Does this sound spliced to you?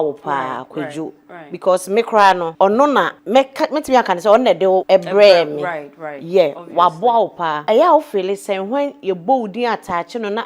yes; 4 cuts; at 2.5 s, 3.2 s, 4.8 s, 7.6 s

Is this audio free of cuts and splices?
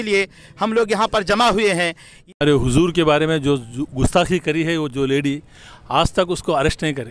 no; 1 cut; at 2.2 s

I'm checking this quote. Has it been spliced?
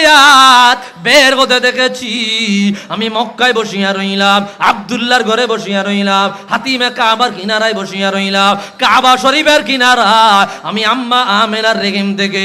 no; 0 cuts

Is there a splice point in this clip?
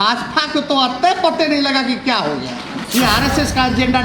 yes; 1 cut; at 2.8 s

